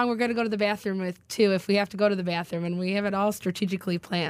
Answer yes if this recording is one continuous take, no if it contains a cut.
yes